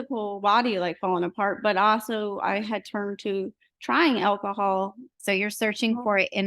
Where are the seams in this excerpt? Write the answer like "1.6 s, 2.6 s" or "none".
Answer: 5.2 s